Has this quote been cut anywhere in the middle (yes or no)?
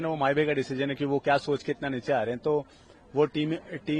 no